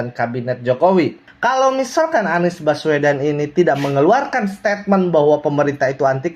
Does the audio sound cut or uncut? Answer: cut